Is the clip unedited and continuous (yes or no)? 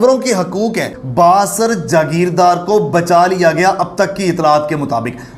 no